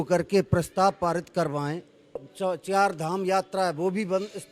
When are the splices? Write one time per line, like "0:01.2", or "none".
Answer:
0:02.3